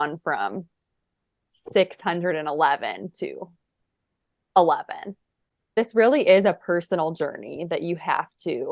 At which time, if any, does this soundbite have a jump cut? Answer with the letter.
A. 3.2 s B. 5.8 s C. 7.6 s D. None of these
B